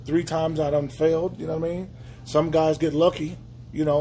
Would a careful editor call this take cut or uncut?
uncut